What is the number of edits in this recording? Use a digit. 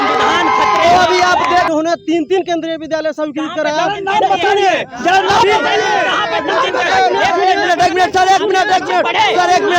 1